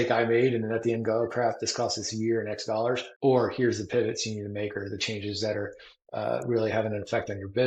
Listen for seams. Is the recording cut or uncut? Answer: cut